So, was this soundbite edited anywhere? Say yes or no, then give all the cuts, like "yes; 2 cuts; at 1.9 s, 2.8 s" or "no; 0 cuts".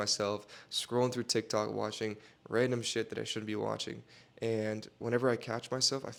no; 0 cuts